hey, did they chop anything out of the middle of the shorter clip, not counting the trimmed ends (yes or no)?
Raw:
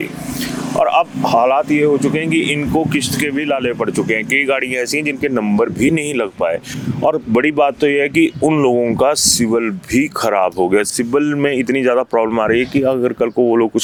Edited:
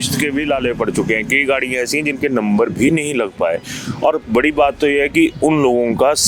no